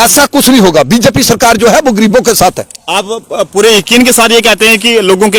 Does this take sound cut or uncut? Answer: uncut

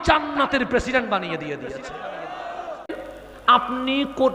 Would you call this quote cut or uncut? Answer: cut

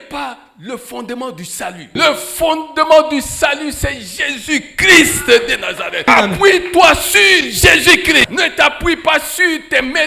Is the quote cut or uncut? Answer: cut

